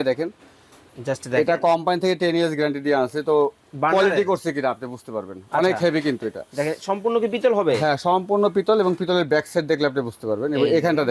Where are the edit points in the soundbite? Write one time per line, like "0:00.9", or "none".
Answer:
none